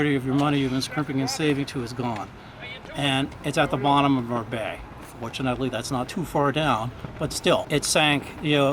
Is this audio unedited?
no; 1 cut; at 7.7 s

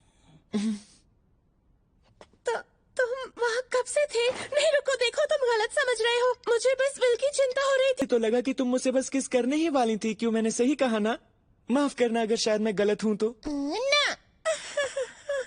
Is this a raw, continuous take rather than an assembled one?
no; 1 cut; at 8.1 s

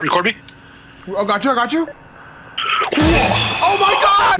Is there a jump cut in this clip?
no; 0 cuts

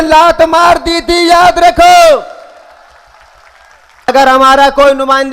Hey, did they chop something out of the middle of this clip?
yes; 1 cut; at 4.1 s

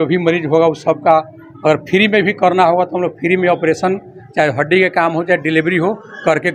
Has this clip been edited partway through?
no; 0 cuts

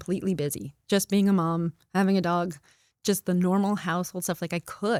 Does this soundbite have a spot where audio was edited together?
no; 0 cuts

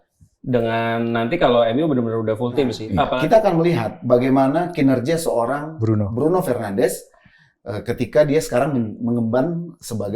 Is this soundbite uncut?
no; 1 cut; at 3.1 s

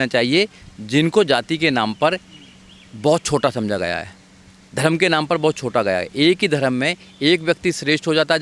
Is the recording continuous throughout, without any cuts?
yes; 0 cuts

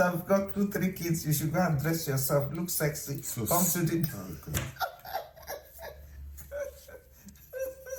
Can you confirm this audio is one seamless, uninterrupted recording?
yes; 0 cuts

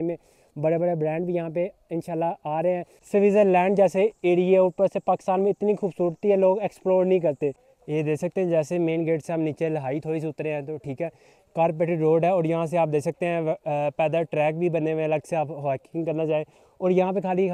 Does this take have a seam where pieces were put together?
yes; 2 cuts; at 2.9 s, 7.7 s

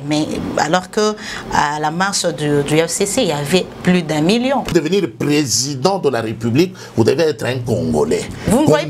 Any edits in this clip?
yes; 1 cut; at 4.7 s

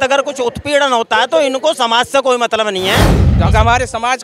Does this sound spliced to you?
yes; 1 cut; at 3.3 s

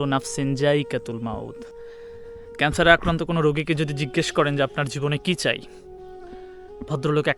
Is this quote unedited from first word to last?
no; 1 cut; at 1.6 s

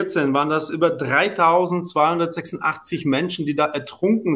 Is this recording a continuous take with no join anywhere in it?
yes; 0 cuts

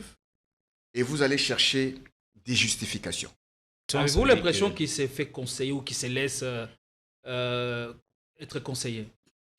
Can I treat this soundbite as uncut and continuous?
no; 1 cut; at 3.9 s

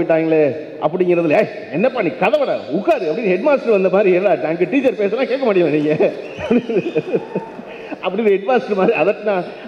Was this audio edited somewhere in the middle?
no; 0 cuts

